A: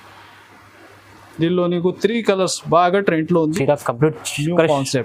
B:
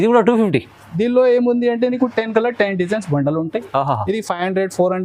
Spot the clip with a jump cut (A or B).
A